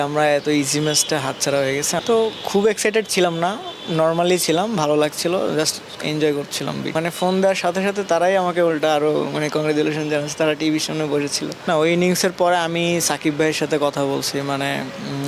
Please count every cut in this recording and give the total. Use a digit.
3